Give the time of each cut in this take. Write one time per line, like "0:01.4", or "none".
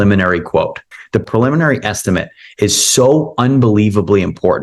0:01.3